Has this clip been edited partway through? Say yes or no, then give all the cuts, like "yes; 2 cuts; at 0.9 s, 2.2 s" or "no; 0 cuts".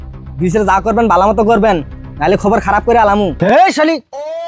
yes; 1 cut; at 3.3 s